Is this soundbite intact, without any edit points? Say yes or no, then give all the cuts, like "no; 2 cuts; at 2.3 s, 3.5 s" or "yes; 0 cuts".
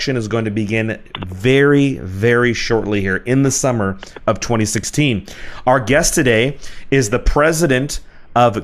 yes; 0 cuts